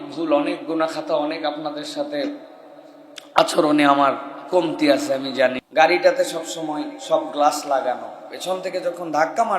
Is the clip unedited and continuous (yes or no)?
no